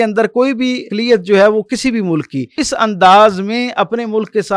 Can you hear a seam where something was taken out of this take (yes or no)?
yes